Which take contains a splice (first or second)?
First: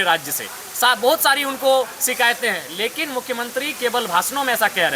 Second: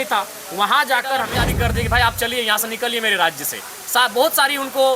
second